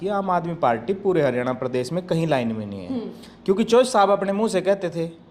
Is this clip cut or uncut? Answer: uncut